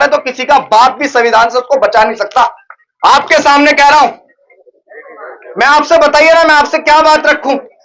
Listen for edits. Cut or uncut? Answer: cut